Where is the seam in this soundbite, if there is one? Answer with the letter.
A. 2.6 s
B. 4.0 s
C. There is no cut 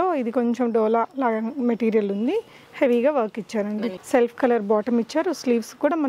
B